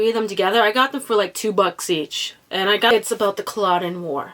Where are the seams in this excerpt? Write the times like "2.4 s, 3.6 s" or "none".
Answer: 2.9 s